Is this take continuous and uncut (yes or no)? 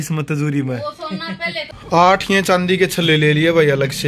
no